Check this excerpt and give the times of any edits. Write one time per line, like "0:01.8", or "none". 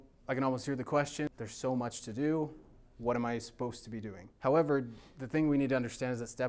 0:01.3
0:04.2